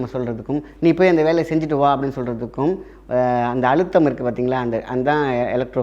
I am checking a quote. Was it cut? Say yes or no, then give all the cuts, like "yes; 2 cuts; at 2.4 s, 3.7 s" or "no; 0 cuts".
no; 0 cuts